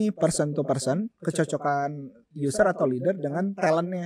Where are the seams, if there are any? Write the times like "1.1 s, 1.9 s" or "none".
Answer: 2.3 s